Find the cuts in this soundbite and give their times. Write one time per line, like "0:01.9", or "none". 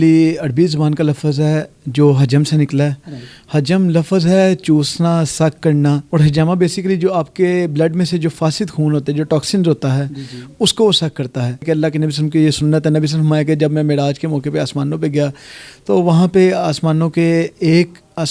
0:06.0
0:11.6